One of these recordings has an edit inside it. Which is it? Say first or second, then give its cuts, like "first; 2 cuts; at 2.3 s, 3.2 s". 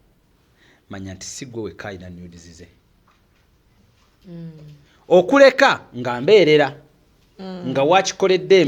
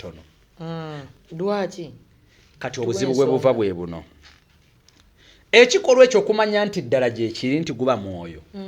second; 1 cut; at 1.0 s